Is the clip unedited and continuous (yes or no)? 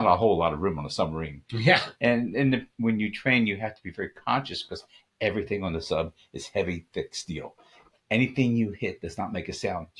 no